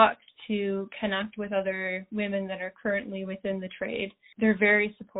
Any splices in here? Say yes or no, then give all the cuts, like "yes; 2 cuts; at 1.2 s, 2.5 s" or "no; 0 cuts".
no; 0 cuts